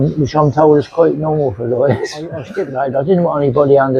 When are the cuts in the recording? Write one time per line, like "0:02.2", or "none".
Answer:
0:02.6